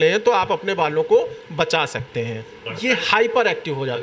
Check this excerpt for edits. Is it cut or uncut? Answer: cut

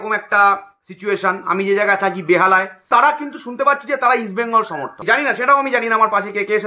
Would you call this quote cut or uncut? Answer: cut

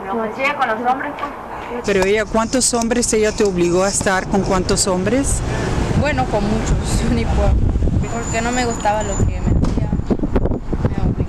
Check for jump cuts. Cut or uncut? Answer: cut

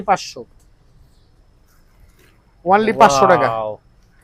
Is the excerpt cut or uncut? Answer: uncut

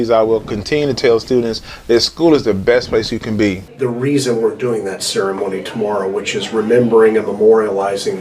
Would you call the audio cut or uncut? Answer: cut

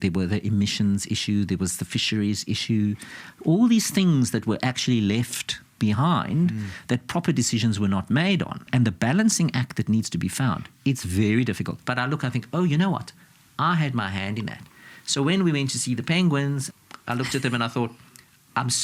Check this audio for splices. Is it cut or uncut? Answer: cut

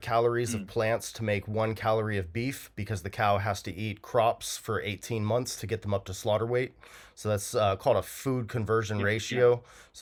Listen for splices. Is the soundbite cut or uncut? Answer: uncut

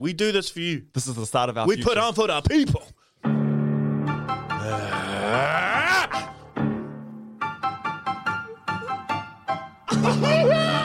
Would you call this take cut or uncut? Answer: uncut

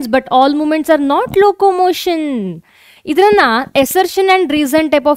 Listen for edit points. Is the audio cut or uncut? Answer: uncut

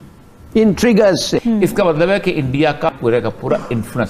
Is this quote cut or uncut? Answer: cut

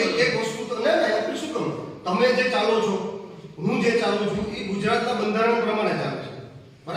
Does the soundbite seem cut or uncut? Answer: cut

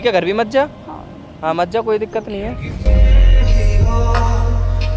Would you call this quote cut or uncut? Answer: uncut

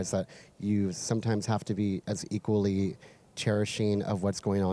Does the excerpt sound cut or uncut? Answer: uncut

